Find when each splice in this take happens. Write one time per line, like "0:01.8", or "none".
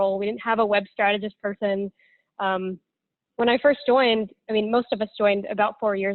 none